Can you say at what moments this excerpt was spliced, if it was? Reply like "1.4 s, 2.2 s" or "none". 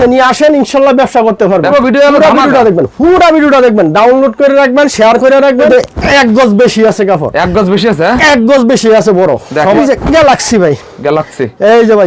1.7 s, 5.7 s, 9.8 s

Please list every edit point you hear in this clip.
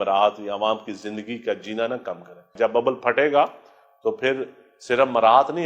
2.5 s

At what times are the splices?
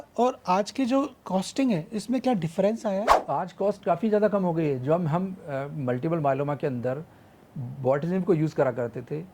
3.2 s

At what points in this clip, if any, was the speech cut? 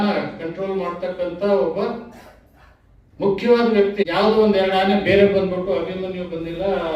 4.0 s

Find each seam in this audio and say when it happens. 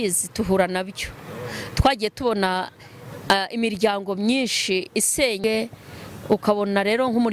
5.4 s

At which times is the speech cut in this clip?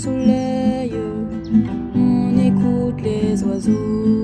none

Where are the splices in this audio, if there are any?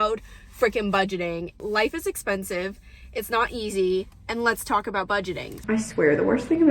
1.6 s, 5.6 s

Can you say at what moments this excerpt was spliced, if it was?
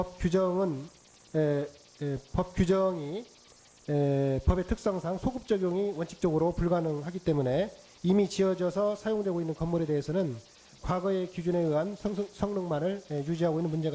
9.0 s

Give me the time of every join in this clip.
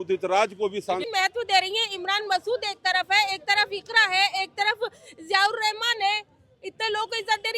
1.1 s

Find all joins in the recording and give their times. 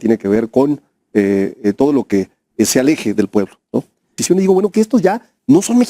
4.2 s

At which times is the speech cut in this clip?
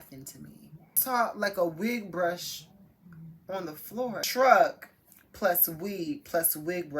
1.0 s, 4.3 s

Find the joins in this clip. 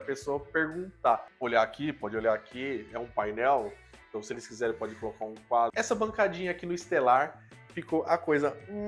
1.3 s, 5.7 s

